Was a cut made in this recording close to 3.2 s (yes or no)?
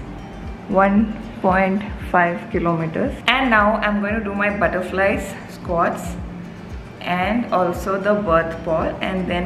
yes